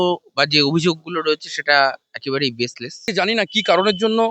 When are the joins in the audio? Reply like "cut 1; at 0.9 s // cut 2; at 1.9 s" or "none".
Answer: cut 1; at 3.1 s